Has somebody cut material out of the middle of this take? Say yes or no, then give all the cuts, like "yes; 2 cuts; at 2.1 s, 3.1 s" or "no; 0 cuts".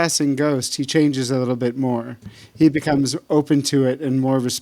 no; 0 cuts